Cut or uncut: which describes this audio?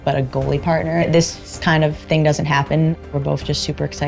cut